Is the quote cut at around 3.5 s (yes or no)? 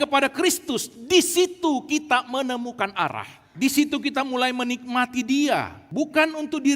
yes